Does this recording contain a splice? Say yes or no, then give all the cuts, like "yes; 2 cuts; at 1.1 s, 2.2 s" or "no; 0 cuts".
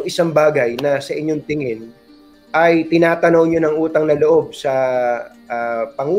no; 0 cuts